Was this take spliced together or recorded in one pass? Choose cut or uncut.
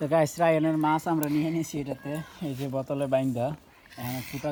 uncut